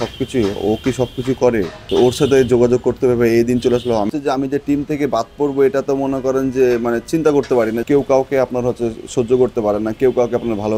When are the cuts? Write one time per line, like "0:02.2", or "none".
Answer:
0:01.8
0:04.1
0:07.8